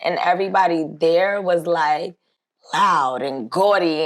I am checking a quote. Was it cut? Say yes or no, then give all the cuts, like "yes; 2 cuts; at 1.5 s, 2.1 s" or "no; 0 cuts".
no; 0 cuts